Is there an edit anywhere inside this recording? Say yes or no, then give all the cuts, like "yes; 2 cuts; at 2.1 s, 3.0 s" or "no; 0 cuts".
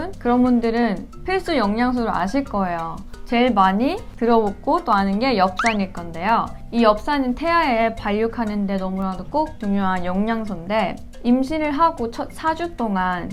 no; 0 cuts